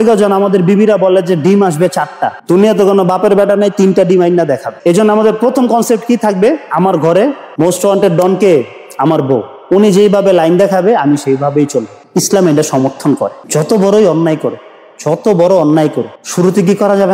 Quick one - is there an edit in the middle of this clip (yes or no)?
yes